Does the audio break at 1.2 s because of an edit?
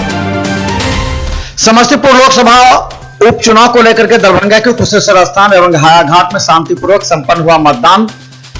yes; 1 cut; at 1.2 s

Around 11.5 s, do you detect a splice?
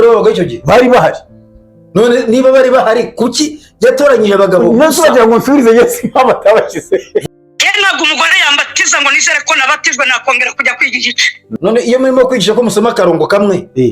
yes; 2 cuts; at 7.2 s, 11.5 s

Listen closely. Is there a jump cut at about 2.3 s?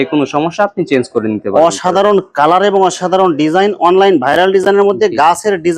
no; 0 cuts

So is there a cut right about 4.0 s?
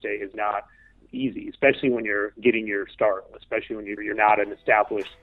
yes; 1 cut; at 4.0 s

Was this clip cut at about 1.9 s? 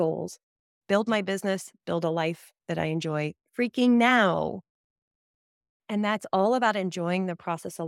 no; 1 cut; at 3.4 s

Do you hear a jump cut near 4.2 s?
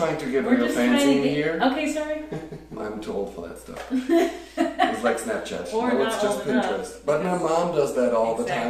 no; 1 cut; at 2.8 s

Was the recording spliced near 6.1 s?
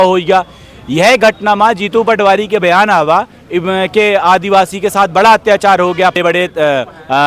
yes; 1 cut; at 6.1 s

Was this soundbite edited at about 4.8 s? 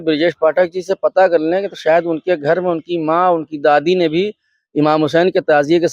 no; 0 cuts

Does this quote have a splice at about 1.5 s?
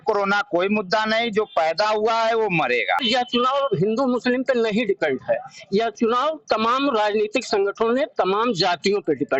no; 1 cut; at 3.0 s

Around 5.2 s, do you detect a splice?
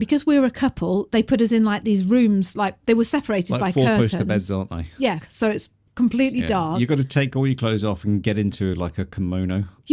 yes; 1 cut; at 5.2 s

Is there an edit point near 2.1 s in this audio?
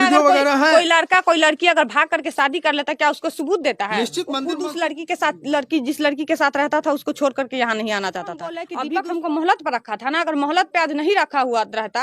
no; 2 cuts; at 4.4 s, 8.7 s

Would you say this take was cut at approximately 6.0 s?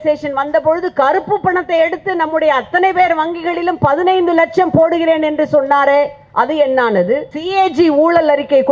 no; 1 cut; at 7.3 s

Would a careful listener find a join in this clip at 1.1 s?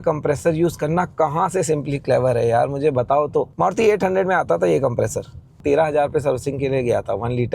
no; 2 cuts; at 3.5 s, 5.6 s

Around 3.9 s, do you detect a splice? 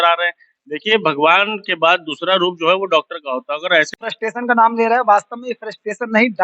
yes; 1 cut; at 3.9 s

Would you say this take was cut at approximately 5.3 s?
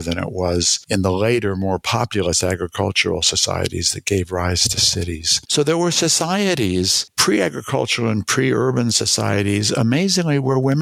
yes; 2 cuts; at 5.3 s, 7.0 s

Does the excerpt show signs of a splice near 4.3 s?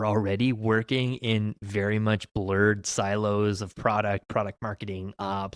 no; 0 cuts

